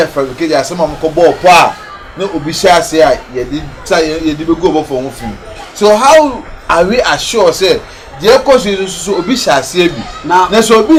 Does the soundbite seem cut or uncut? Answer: uncut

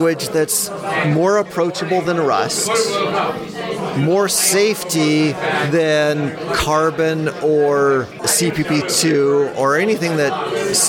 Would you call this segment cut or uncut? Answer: uncut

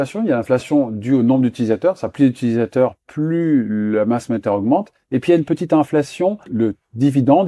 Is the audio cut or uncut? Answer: cut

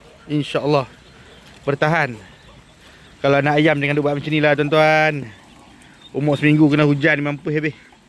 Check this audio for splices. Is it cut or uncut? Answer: uncut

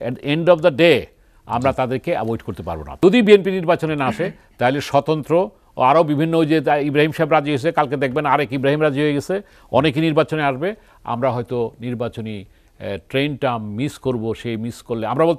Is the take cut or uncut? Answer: cut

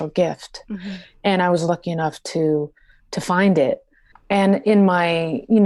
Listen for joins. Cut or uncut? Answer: uncut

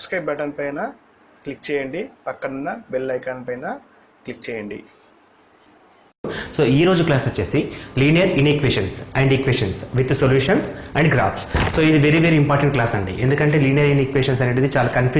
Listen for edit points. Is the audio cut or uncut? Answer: cut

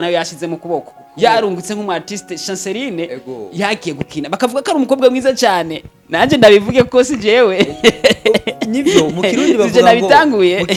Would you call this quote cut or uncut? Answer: uncut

